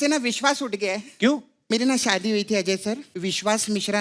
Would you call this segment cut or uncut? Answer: cut